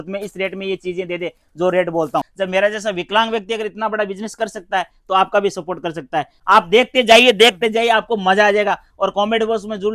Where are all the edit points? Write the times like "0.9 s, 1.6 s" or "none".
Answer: 2.3 s, 6.3 s